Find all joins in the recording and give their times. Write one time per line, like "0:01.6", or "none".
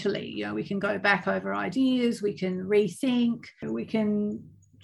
0:03.6